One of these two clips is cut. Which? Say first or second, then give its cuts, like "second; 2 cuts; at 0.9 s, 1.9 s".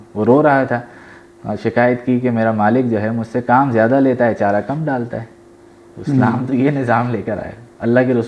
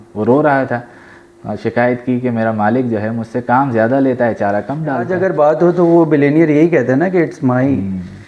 second; 1 cut; at 5.1 s